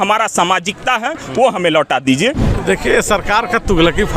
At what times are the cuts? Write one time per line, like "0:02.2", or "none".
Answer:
0:02.5